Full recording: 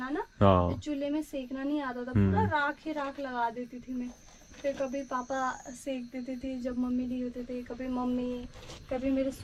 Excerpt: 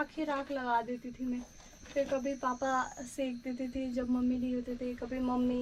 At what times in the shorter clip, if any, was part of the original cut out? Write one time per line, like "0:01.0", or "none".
none